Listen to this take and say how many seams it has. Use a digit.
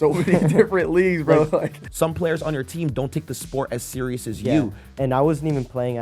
2